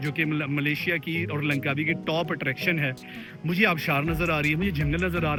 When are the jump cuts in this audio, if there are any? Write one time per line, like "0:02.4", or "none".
none

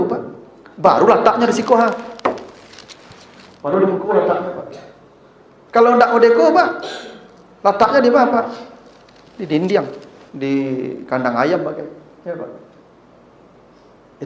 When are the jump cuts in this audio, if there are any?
none

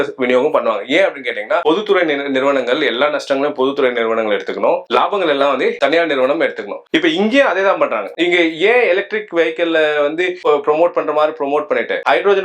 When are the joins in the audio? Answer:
none

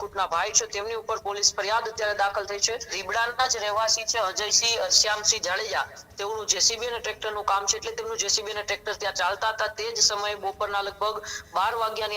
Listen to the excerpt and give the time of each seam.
0:03.0

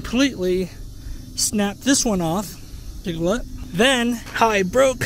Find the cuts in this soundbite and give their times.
none

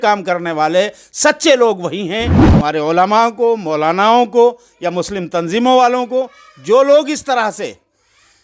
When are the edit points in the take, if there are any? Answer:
0:02.4

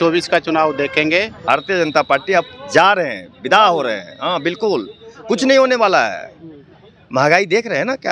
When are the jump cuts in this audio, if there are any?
0:01.4

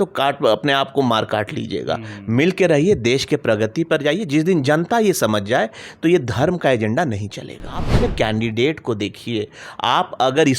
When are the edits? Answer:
0:07.9

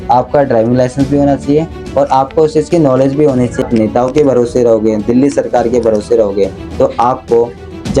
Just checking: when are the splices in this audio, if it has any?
0:03.6

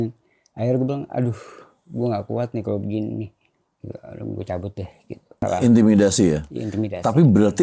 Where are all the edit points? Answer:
0:05.5

